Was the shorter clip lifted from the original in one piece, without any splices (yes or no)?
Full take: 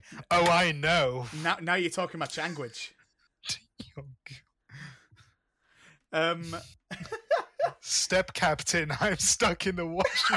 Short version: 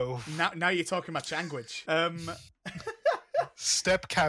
no